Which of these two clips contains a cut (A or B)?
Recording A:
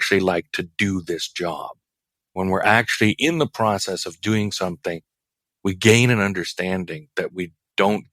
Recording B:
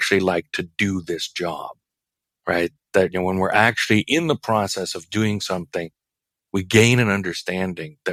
A